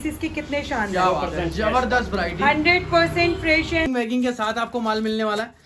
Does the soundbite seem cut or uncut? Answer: cut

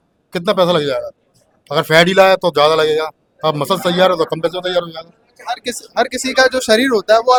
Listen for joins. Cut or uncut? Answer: uncut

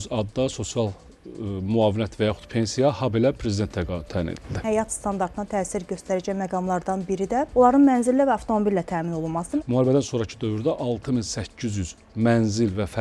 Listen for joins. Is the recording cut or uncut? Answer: cut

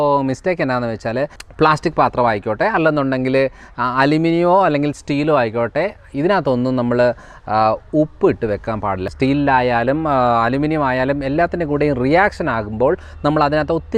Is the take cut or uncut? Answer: cut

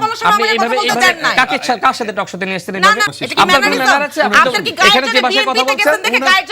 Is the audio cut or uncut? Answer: cut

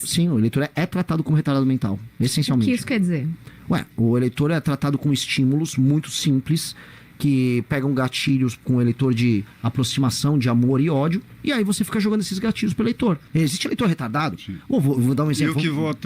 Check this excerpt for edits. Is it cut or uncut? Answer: cut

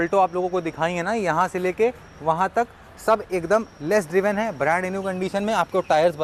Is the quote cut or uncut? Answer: uncut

